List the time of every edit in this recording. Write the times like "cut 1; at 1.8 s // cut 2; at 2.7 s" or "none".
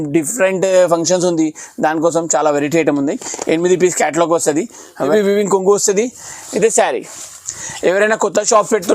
cut 1; at 5.1 s